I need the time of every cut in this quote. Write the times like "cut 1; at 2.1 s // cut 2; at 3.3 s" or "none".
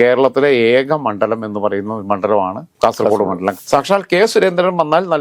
cut 1; at 3.5 s